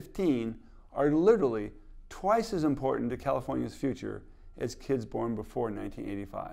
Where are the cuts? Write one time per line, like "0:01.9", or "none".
none